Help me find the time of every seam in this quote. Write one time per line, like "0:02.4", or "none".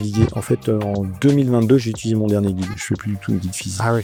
none